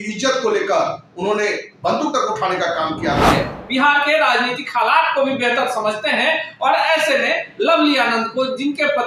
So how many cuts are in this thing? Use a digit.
1